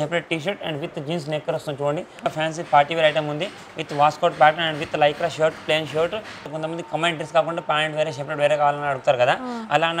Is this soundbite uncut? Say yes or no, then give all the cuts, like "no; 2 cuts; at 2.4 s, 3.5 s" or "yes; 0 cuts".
no; 2 cuts; at 2.3 s, 6.4 s